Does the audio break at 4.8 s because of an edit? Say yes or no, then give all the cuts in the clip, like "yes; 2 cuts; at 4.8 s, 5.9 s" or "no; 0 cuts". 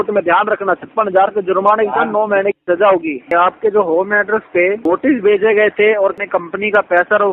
yes; 3 cuts; at 3.2 s, 4.8 s, 6.2 s